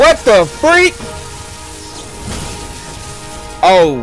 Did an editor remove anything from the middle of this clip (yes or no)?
no